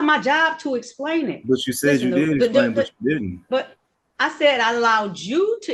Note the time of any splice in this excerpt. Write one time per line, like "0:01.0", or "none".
none